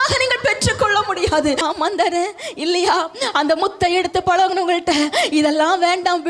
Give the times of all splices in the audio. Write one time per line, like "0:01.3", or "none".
0:01.6